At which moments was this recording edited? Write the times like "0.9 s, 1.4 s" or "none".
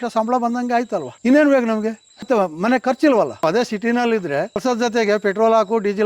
1.1 s, 2.2 s, 3.4 s, 4.6 s